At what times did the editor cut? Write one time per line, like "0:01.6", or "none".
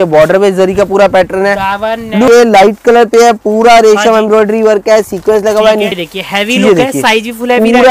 0:02.3
0:05.9